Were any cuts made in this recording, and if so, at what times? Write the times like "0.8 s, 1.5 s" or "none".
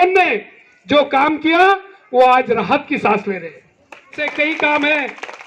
4.2 s